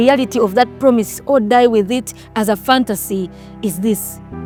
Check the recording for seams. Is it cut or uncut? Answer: uncut